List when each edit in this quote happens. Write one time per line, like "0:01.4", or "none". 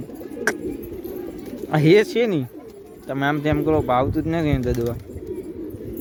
none